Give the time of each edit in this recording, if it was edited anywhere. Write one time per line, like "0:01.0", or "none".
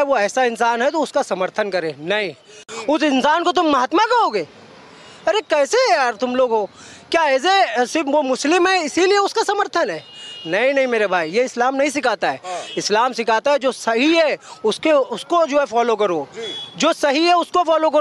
0:02.7